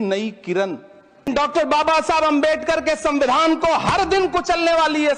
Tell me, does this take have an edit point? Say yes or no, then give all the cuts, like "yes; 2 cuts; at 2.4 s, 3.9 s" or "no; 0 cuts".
yes; 1 cut; at 1.2 s